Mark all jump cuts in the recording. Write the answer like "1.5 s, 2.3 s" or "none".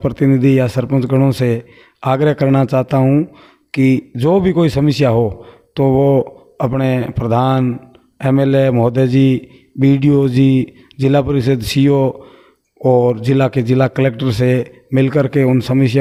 none